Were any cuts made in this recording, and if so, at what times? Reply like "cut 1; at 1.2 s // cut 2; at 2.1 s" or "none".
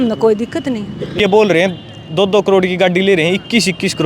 cut 1; at 1.2 s